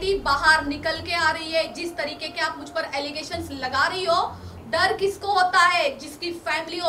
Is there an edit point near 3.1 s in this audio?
no; 1 cut; at 4.5 s

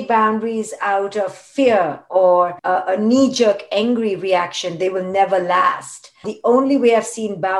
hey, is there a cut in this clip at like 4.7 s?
no; 2 cuts; at 2.6 s, 6.3 s

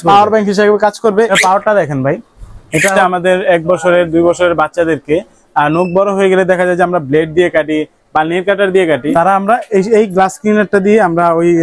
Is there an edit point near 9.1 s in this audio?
yes; 2 cuts; at 3.0 s, 9.1 s

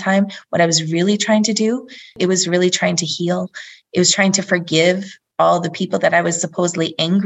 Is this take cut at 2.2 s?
yes; 1 cut; at 2.2 s

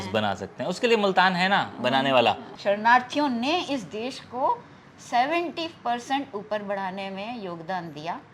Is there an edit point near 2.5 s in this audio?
yes; 1 cut; at 2.5 s

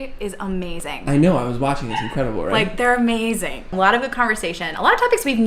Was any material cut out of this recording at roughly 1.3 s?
no; 1 cut; at 3.6 s

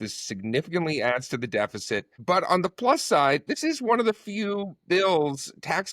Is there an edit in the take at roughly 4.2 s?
no; 1 cut; at 2.1 s

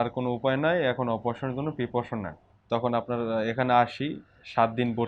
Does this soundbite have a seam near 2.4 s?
yes; 1 cut; at 2.4 s

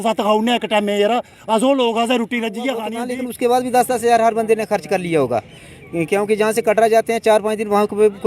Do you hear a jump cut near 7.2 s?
no; 1 cut; at 3.0 s

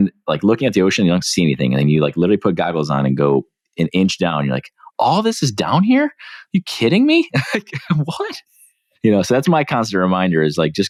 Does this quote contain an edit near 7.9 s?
no; 0 cuts

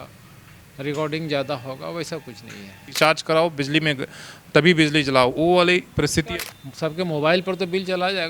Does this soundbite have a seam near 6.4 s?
yes; 2 cuts; at 2.9 s, 6.4 s

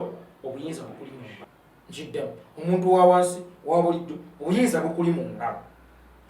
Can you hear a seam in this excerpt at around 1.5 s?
yes; 1 cut; at 1.5 s

